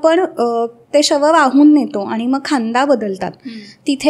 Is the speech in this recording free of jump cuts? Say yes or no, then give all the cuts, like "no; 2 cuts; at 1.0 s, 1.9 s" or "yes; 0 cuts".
yes; 0 cuts